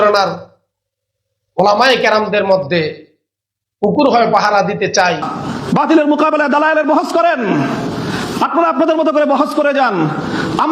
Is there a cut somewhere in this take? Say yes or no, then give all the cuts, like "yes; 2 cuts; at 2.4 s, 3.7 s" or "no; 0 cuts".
yes; 1 cut; at 5.3 s